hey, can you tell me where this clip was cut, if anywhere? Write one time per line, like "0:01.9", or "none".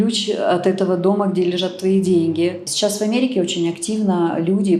0:02.7